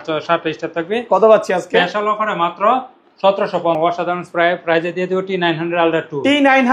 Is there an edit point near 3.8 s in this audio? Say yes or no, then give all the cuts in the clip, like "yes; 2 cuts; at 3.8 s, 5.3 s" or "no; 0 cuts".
yes; 1 cut; at 3.8 s